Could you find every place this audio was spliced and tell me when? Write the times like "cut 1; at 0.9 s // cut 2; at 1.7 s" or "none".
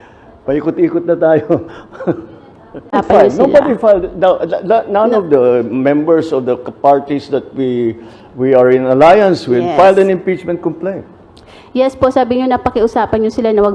cut 1; at 3.0 s